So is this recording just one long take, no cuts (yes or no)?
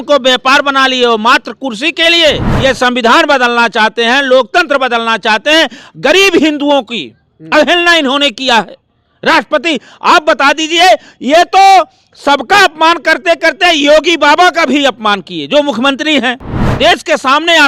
no